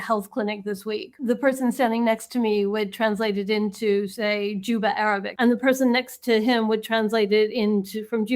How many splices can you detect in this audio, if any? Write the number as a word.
two